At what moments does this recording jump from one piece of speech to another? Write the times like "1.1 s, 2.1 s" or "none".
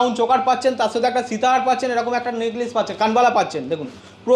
none